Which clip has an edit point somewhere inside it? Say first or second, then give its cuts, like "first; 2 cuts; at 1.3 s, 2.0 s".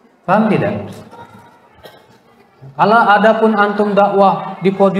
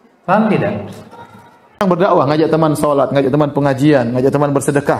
second; 1 cut; at 1.8 s